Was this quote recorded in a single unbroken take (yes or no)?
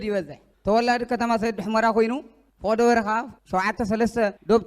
no